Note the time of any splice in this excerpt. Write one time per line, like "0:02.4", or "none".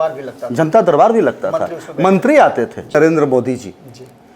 0:02.9